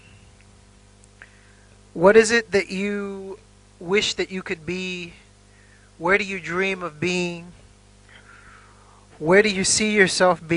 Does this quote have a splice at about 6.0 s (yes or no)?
no